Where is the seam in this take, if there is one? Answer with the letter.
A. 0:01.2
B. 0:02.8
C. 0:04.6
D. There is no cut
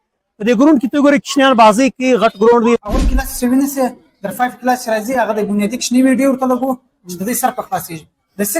B